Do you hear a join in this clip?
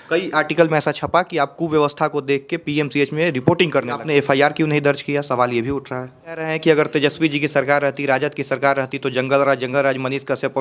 yes; 2 cuts; at 4.0 s, 6.5 s

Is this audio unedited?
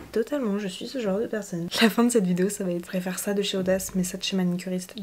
no; 2 cuts; at 1.4 s, 2.8 s

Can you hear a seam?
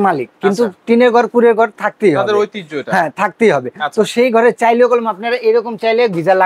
no; 0 cuts

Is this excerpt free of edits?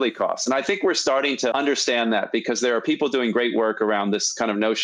yes; 0 cuts

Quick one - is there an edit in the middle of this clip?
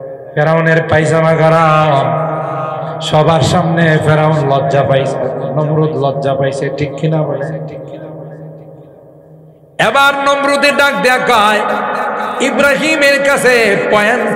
no; 0 cuts

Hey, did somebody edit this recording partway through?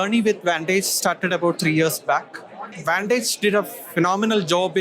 yes; 1 cut; at 2.7 s

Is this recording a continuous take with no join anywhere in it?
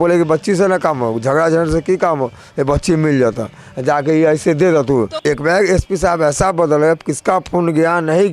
no; 1 cut; at 5.1 s

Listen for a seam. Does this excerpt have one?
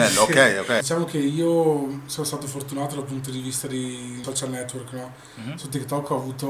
yes; 2 cuts; at 0.9 s, 4.2 s

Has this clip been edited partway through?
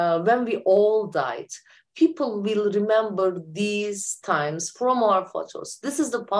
no; 0 cuts

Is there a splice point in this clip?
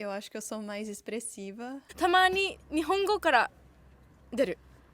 yes; 1 cut; at 1.9 s

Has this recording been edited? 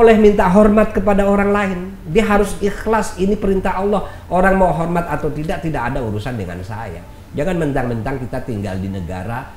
no; 0 cuts

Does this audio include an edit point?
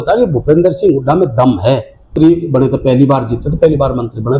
yes; 1 cut; at 2.1 s

